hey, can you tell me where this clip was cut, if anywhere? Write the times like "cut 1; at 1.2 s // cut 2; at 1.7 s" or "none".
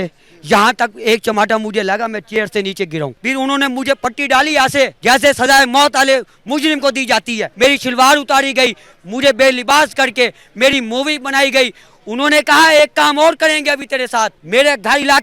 cut 1; at 3.2 s // cut 2; at 5.0 s // cut 3; at 7.5 s // cut 4; at 14.4 s

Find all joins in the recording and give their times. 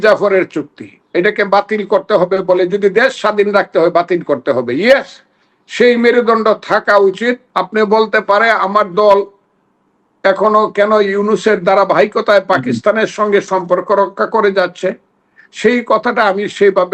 cut 1; at 1.0 s // cut 2; at 7.5 s

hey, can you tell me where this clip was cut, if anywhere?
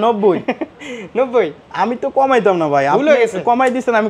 cut 1; at 1.6 s

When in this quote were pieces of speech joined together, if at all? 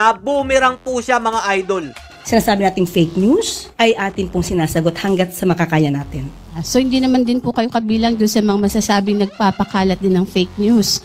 cut 1; at 2.1 s

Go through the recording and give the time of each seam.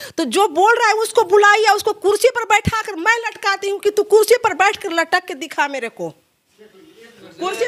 none

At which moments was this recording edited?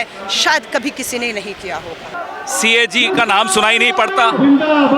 cut 1; at 2.1 s

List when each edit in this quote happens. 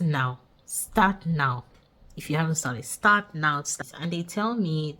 cut 1; at 3.8 s

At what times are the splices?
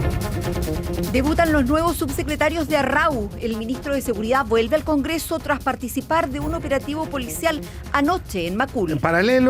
cut 1; at 1.1 s

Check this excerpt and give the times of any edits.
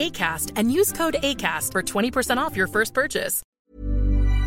cut 1; at 3.4 s

